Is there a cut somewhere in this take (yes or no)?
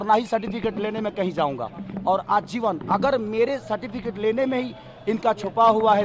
no